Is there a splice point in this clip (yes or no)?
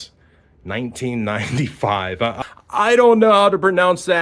yes